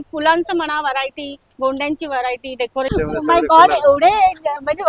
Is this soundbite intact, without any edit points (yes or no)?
no